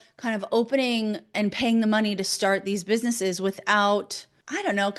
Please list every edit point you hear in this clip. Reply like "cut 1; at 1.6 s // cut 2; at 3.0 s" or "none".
cut 1; at 1.3 s

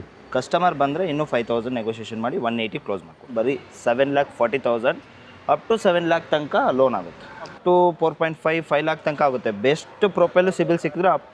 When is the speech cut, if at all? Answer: cut 1; at 3.2 s // cut 2; at 7.5 s

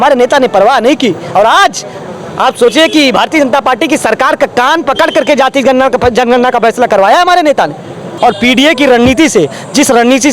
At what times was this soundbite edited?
cut 1; at 8.1 s

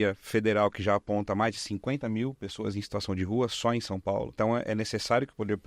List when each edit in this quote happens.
cut 1; at 4.3 s

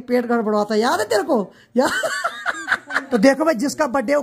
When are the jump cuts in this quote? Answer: cut 1; at 3.0 s

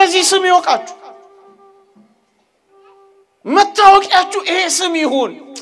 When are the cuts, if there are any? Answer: none

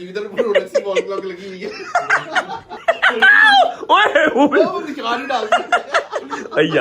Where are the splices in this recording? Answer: cut 1; at 2.7 s

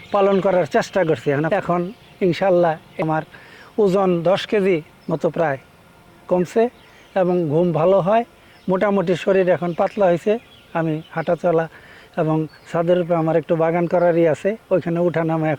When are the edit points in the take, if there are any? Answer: cut 1; at 1.5 s // cut 2; at 2.9 s

